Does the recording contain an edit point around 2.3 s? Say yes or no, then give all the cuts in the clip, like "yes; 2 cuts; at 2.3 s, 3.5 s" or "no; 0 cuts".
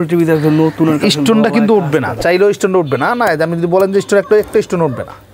no; 0 cuts